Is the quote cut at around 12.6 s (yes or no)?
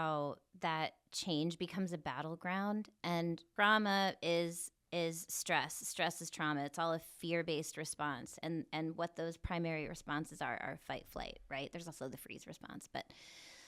no